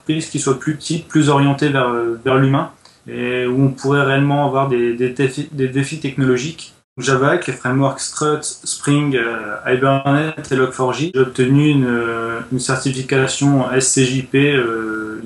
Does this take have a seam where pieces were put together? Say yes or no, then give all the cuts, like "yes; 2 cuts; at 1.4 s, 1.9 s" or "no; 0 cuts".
yes; 2 cuts; at 7.0 s, 11.1 s